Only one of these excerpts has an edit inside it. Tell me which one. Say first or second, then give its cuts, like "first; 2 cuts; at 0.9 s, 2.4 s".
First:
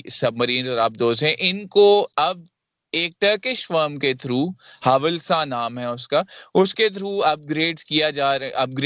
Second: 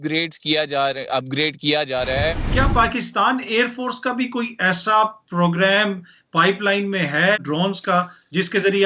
second; 2 cuts; at 2.3 s, 7.4 s